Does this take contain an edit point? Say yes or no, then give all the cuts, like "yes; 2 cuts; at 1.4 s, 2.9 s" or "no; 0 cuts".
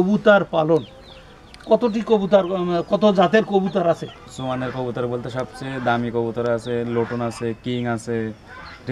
yes; 1 cut; at 4.0 s